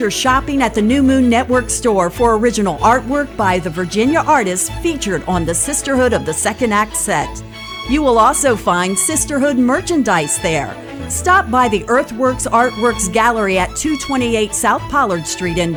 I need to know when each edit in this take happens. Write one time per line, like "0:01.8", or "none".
none